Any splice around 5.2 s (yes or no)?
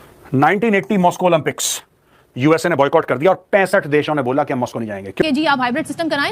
yes